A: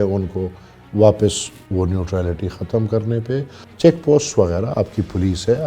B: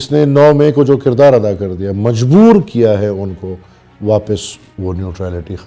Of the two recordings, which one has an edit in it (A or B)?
A